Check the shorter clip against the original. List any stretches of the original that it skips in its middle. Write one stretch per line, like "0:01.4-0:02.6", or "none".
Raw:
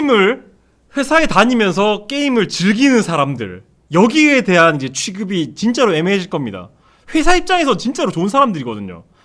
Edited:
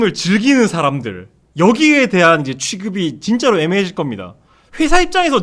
none